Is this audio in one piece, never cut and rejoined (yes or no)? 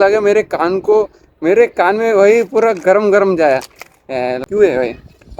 no